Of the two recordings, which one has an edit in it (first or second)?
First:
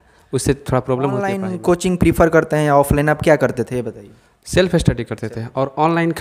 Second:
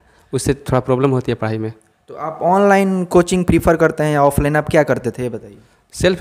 first